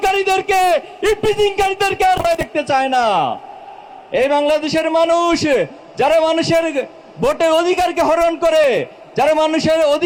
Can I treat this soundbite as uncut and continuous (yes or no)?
yes